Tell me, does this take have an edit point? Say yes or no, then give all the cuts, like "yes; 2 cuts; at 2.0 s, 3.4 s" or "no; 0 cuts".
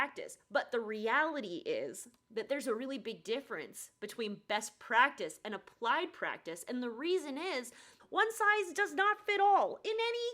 yes; 1 cut; at 7.9 s